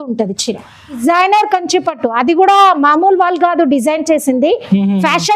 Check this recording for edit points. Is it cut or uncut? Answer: cut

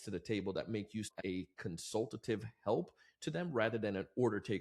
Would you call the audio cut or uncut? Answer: cut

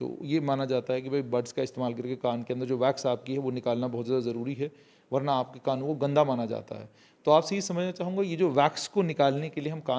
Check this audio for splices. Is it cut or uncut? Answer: uncut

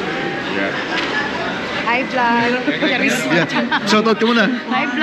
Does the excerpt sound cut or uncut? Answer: cut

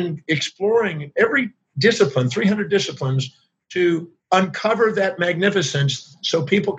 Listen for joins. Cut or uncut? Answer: cut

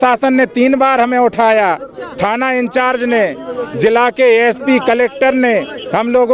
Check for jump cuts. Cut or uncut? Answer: uncut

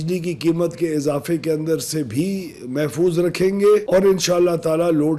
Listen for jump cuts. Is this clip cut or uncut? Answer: uncut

